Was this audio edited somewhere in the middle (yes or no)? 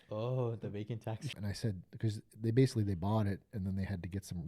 yes